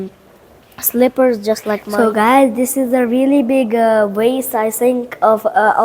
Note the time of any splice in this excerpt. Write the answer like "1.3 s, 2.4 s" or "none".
1.9 s

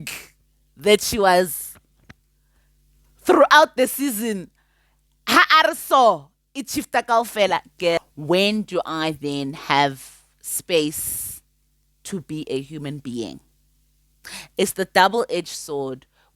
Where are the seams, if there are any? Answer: 8.0 s

